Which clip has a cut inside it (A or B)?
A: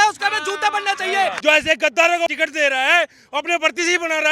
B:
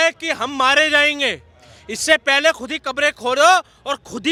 A